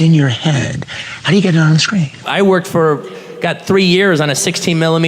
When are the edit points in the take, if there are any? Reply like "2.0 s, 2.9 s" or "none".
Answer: 2.3 s

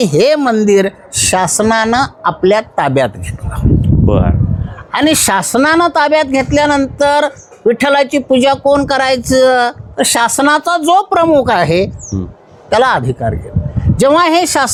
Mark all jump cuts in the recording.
none

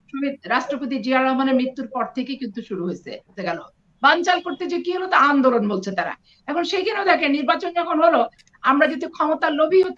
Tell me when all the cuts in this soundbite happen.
none

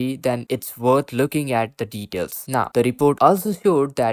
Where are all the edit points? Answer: none

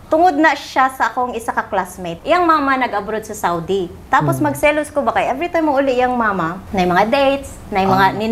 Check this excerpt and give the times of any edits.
2.1 s, 6.6 s

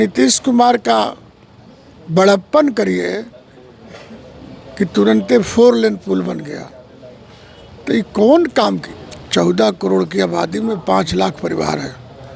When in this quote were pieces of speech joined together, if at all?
8.8 s

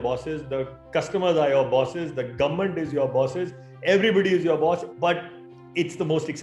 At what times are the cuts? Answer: 4.9 s

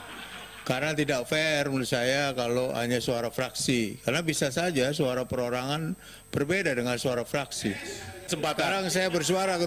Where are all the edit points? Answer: 8.3 s

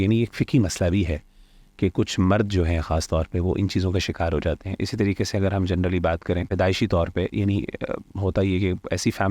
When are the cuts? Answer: 6.5 s

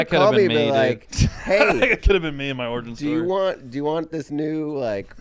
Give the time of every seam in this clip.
none

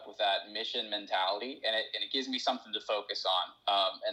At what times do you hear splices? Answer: none

